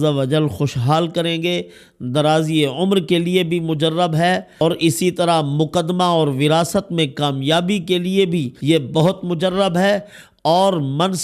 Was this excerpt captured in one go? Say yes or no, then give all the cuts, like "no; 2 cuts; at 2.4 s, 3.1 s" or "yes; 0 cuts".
no; 2 cuts; at 4.5 s, 8.5 s